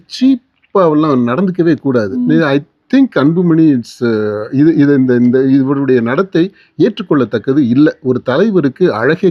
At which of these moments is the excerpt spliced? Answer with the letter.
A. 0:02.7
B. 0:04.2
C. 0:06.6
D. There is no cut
D